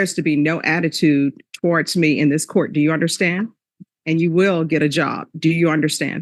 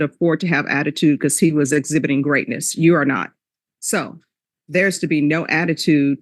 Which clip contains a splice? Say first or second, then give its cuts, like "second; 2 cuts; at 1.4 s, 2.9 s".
second; 1 cut; at 3.6 s